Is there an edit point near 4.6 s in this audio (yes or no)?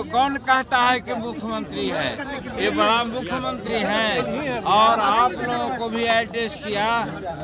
no